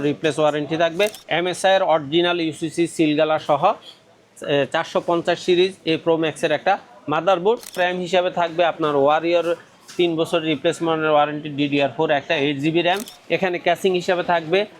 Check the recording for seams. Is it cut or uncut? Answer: cut